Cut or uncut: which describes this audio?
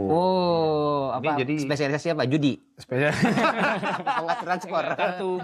uncut